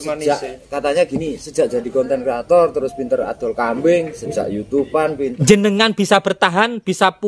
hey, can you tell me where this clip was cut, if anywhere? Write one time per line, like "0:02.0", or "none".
0:05.2